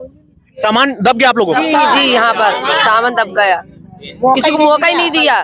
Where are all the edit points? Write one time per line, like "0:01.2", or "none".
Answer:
none

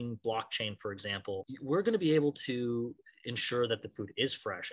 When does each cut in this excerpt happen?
0:01.5

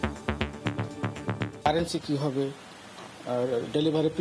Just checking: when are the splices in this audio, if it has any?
0:01.6

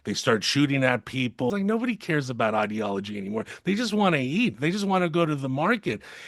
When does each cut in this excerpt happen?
0:01.5

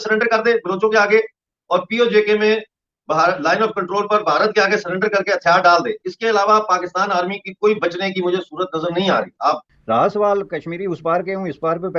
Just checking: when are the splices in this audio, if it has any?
0:09.7

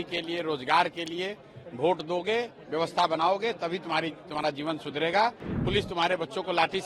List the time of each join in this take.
0:05.5

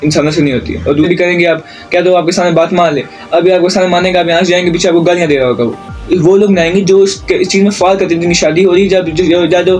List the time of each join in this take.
0:01.1
0:05.9

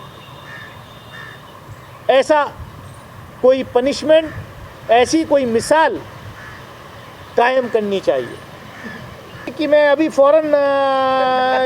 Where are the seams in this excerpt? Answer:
0:09.5

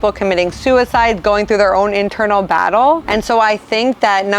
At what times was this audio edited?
0:03.0

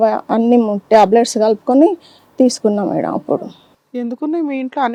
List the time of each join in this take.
none

